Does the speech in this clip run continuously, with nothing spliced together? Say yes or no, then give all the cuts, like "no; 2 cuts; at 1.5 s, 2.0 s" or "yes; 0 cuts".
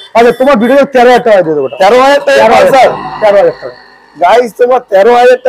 yes; 0 cuts